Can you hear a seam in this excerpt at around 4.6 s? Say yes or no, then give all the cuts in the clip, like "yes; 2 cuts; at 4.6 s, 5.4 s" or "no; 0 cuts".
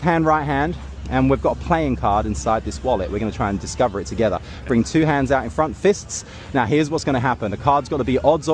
no; 1 cut; at 1.6 s